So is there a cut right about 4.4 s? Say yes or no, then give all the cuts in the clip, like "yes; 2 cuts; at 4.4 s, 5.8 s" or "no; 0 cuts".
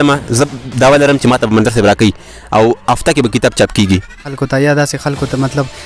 yes; 1 cut; at 4.4 s